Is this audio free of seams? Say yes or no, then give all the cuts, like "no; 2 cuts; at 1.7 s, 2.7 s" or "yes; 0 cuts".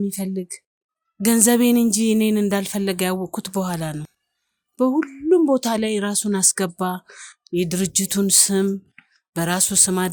yes; 0 cuts